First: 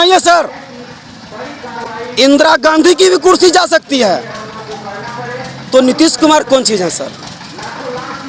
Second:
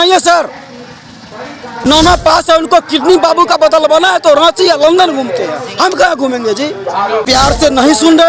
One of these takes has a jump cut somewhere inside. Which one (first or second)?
second